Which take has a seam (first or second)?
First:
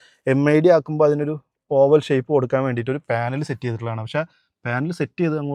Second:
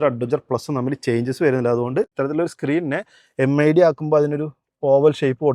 second